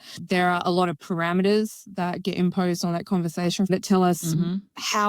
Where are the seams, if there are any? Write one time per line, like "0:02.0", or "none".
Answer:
0:03.7